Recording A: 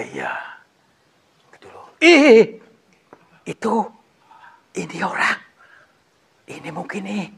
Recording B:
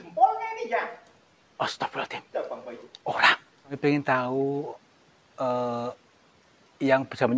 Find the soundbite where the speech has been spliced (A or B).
B